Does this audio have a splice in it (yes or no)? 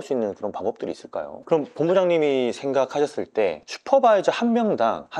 yes